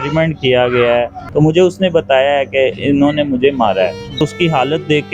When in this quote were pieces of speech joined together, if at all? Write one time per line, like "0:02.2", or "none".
0:01.2
0:04.2